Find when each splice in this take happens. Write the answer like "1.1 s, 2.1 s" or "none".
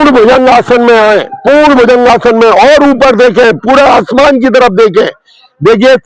none